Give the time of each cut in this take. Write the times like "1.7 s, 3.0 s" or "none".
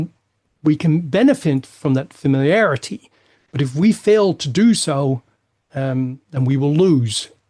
none